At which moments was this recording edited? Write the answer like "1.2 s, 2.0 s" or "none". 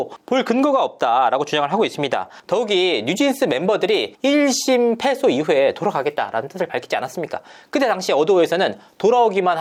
none